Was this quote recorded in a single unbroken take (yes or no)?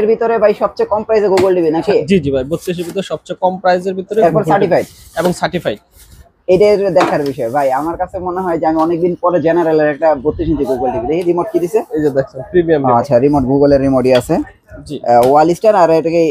yes